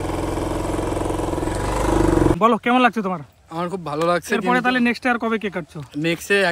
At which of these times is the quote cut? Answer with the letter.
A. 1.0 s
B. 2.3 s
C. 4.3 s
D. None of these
B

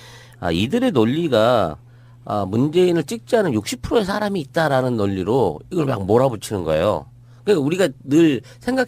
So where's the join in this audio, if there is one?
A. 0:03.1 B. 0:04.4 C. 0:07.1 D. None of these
B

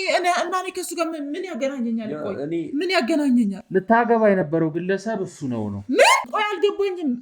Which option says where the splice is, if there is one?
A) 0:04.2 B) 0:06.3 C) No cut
B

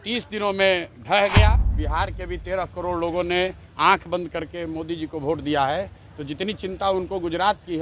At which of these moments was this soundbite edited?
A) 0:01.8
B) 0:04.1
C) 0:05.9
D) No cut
A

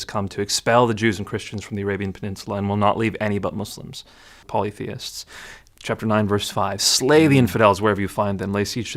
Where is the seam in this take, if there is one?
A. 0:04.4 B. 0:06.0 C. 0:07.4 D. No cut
A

